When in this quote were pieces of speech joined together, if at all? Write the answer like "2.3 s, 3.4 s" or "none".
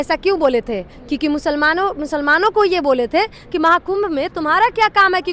none